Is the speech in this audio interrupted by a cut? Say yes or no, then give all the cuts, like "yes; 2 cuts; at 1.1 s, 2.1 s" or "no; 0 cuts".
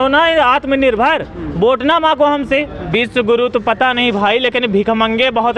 yes; 1 cut; at 2.8 s